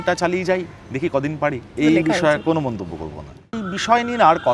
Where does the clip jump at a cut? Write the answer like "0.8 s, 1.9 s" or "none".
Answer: 1.7 s, 3.5 s